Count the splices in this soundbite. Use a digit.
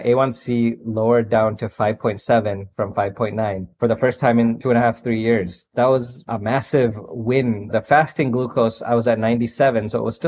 1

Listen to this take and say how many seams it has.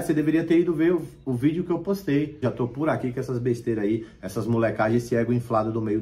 1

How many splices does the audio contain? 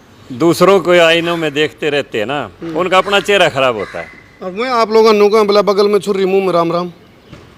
0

